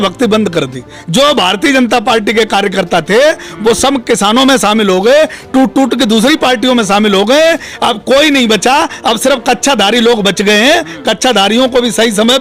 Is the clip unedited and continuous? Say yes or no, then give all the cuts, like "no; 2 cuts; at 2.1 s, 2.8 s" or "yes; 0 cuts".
yes; 0 cuts